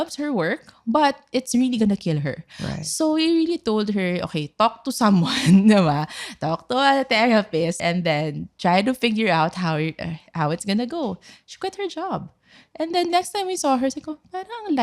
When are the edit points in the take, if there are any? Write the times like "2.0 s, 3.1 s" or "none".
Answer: 7.8 s